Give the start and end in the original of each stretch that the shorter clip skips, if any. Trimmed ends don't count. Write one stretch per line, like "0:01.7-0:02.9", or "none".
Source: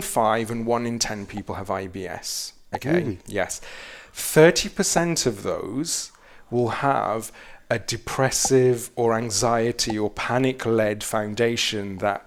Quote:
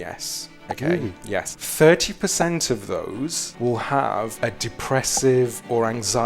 0:03.6-0:04.2
0:06.0-0:06.4
0:07.2-0:07.6